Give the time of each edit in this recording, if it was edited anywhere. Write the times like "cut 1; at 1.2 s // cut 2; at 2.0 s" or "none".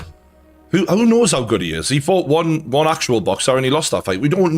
none